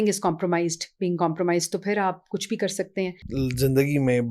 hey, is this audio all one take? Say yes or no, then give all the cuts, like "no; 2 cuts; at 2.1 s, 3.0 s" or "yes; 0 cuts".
no; 1 cut; at 3.2 s